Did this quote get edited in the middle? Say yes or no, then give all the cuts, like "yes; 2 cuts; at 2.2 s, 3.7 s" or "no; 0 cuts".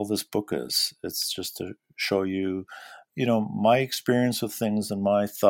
yes; 1 cut; at 3.0 s